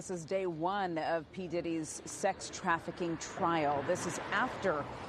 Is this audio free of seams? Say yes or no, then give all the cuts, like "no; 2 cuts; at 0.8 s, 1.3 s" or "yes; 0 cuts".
no; 1 cut; at 3.8 s